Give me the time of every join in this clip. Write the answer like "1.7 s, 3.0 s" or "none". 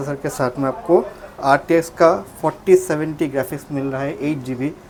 none